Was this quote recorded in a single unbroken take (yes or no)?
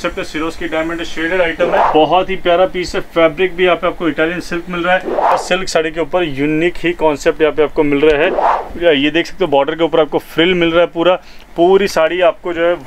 no